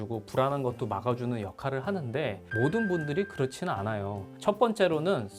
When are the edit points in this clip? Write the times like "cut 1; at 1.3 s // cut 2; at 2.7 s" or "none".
cut 1; at 2.4 s // cut 2; at 4.3 s